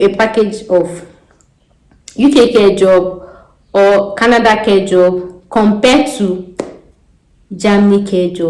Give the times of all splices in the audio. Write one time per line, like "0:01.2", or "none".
none